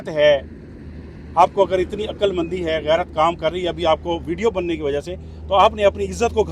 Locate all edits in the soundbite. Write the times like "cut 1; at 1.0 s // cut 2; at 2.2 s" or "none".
none